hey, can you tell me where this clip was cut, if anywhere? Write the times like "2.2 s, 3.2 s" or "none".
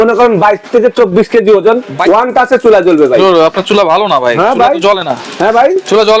1.9 s